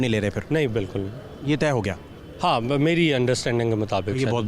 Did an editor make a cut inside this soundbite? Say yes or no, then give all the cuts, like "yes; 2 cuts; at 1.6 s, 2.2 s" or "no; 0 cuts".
no; 0 cuts